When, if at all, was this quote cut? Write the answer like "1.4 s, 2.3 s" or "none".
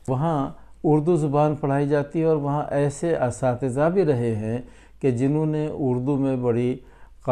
none